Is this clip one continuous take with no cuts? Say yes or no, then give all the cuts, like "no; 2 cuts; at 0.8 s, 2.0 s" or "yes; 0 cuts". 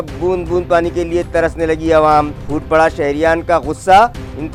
yes; 0 cuts